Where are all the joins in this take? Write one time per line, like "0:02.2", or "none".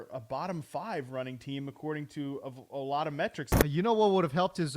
0:03.5